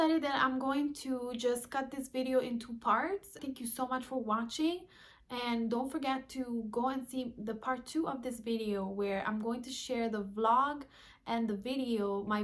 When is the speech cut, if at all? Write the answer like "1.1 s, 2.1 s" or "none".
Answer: 3.4 s